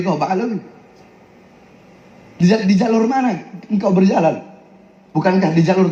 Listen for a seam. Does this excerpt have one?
no; 0 cuts

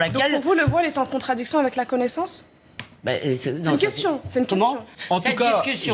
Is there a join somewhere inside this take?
yes; 1 cut; at 4.9 s

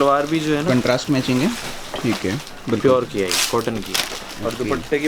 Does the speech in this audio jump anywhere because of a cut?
no; 0 cuts

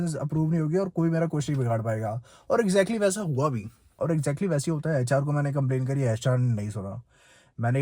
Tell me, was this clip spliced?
no; 0 cuts

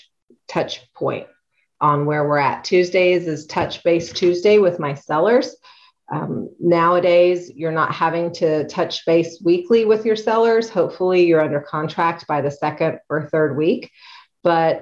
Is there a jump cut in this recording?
no; 0 cuts

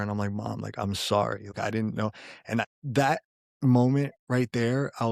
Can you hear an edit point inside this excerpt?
yes; 2 cuts; at 1.5 s, 2.7 s

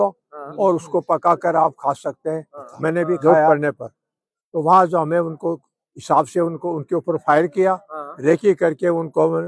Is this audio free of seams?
no; 1 cut; at 3.5 s

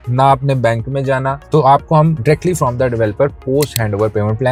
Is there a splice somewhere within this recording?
no; 0 cuts

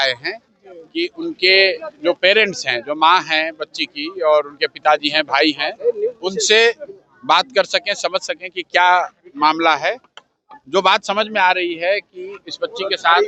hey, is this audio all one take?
yes; 0 cuts

